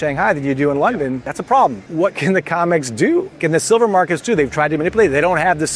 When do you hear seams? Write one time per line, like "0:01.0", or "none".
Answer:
0:01.3
0:01.9
0:03.4